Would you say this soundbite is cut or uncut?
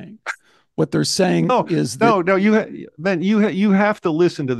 uncut